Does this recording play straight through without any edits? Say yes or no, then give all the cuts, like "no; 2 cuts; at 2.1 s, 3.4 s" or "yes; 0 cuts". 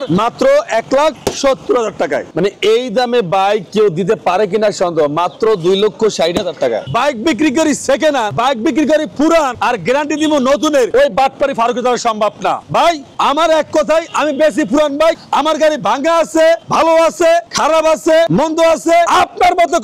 no; 6 cuts; at 2.3 s, 6.8 s, 8.3 s, 9.5 s, 10.9 s, 12.9 s